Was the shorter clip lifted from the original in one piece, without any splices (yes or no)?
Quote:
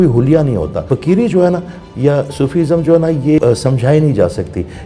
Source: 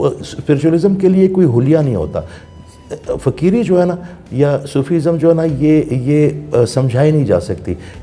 no